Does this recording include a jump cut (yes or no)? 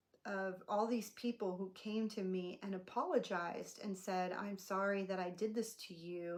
no